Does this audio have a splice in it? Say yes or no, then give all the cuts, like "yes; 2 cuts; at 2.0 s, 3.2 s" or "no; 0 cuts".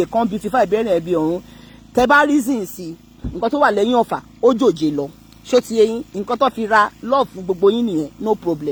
no; 0 cuts